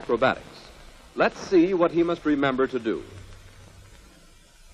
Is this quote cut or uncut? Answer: uncut